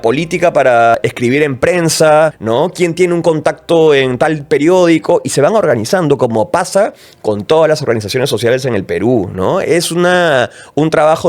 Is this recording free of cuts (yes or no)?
no